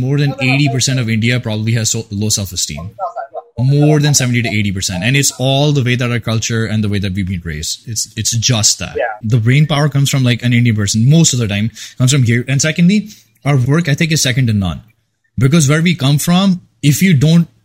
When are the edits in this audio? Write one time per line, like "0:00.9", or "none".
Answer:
0:09.2
0:13.6

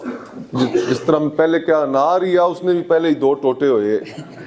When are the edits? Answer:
none

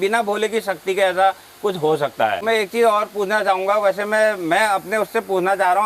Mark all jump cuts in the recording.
0:02.4

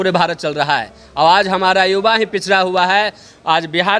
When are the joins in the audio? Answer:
none

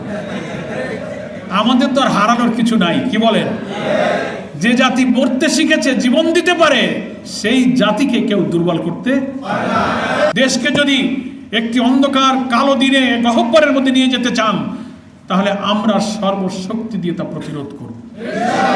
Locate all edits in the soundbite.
0:10.3

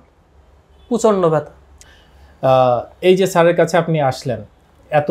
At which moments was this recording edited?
0:01.8

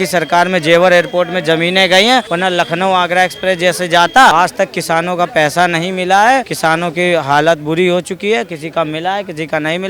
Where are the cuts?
0:02.3
0:04.3
0:06.5

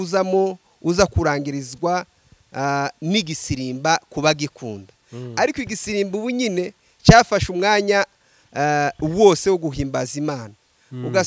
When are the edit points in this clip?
none

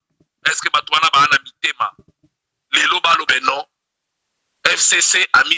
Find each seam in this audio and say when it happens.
0:03.3

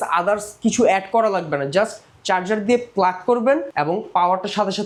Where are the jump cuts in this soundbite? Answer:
none

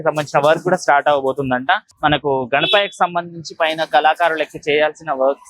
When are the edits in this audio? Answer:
0:01.9

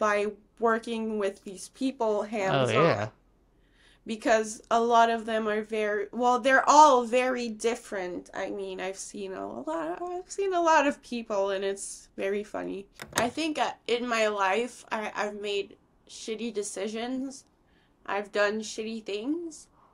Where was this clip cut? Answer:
0:13.0

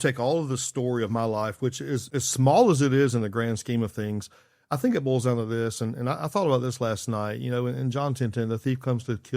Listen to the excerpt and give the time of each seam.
0:02.1

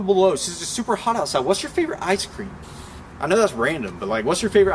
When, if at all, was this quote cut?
none

